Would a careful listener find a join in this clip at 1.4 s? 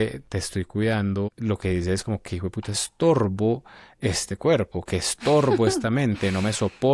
yes; 1 cut; at 1.4 s

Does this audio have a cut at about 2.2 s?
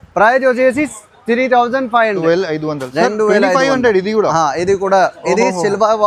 yes; 1 cut; at 2.2 s

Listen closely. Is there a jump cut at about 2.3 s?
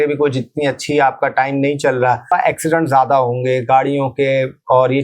yes; 1 cut; at 2.3 s

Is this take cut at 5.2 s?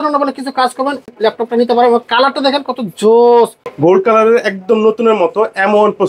no; 2 cuts; at 1.1 s, 3.6 s

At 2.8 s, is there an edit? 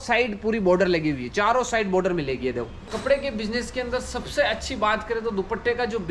yes; 1 cut; at 2.8 s

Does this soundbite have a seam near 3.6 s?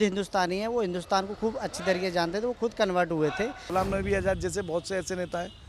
yes; 1 cut; at 3.6 s

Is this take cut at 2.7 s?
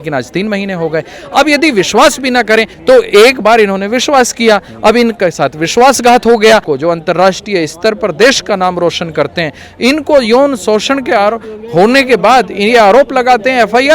yes; 2 cuts; at 2.7 s, 6.7 s

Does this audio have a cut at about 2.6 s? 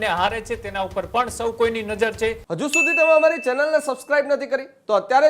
yes; 1 cut; at 2.6 s

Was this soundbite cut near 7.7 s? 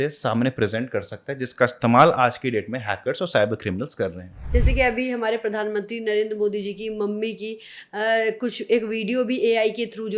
no; 1 cut; at 4.3 s

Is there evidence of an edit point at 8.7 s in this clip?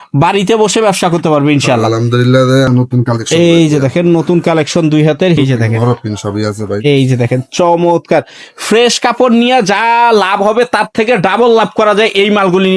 no; 2 cuts; at 2.7 s, 5.4 s

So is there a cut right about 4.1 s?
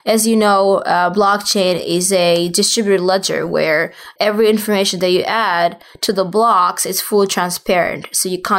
yes; 1 cut; at 4.1 s

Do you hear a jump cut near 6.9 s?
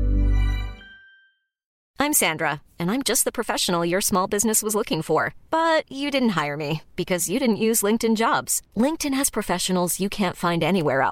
no; 1 cut; at 1.9 s

